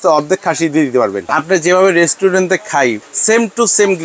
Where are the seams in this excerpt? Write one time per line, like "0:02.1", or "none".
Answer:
0:01.3
0:03.1